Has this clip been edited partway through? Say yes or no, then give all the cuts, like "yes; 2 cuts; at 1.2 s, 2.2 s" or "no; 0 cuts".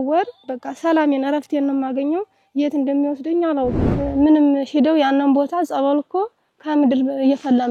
yes; 1 cut; at 3.9 s